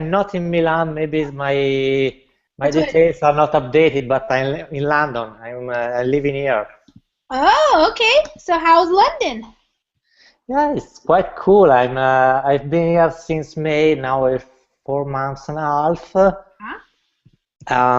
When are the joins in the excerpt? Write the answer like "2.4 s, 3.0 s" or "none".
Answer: none